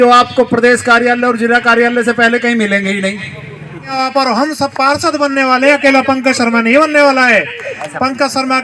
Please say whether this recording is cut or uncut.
cut